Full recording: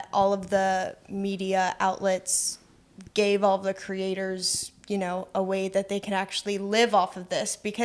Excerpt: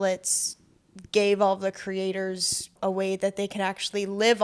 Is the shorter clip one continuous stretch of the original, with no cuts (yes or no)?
no